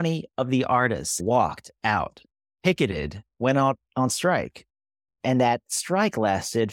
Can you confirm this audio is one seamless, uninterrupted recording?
no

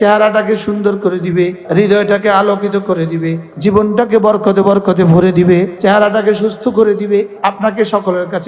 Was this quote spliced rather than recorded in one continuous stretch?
yes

